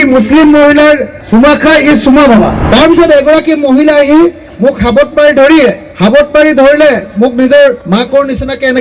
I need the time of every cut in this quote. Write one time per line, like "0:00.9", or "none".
0:01.1
0:02.6
0:05.9
0:07.8